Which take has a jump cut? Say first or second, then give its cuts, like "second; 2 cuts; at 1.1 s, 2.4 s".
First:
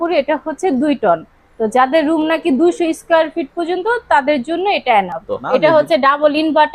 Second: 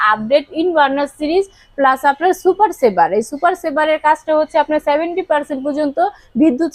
first; 1 cut; at 5.3 s